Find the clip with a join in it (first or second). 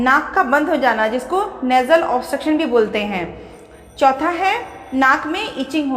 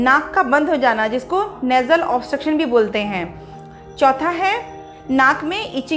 first